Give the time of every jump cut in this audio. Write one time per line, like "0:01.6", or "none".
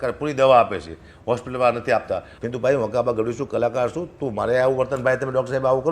0:02.4